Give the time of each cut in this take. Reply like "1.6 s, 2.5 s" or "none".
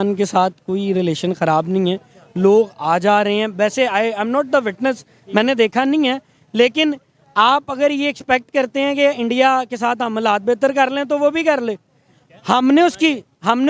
none